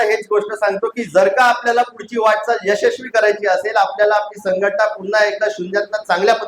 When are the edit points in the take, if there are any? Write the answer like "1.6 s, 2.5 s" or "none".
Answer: none